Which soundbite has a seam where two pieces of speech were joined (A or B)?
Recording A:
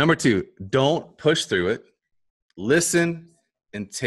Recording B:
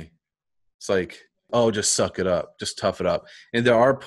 B